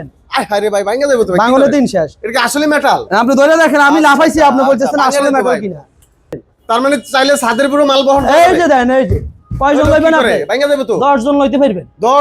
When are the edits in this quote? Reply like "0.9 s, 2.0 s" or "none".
6.3 s